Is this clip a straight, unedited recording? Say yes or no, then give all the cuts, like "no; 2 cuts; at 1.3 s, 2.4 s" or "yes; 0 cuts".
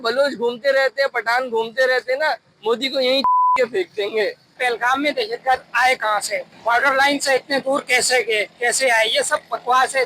no; 2 cuts; at 4.6 s, 6.5 s